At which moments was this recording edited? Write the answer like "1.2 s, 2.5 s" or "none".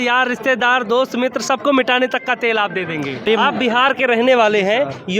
3.3 s